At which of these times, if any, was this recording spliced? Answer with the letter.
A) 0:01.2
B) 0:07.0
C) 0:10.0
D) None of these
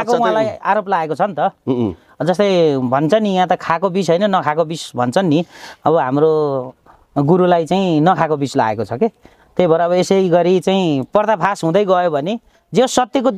D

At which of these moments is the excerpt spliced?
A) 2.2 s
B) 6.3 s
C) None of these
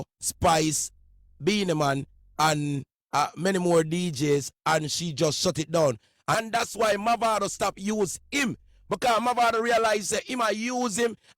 B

